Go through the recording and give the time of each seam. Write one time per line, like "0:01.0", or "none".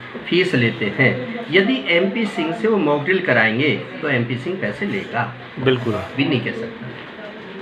0:06.1

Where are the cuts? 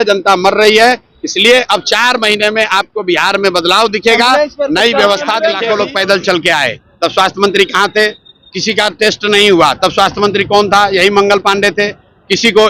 0:05.6

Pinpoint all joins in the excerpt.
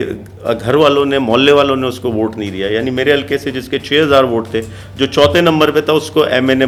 none

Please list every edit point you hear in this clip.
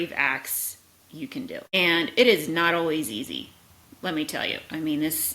none

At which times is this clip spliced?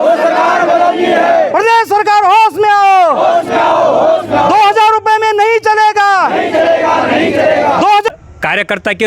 0:08.1

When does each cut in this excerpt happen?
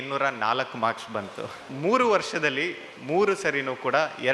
0:01.7

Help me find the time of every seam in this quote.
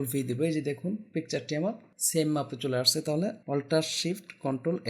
0:01.9
0:03.4

